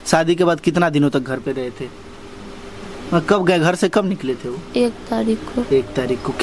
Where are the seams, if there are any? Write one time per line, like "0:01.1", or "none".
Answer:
none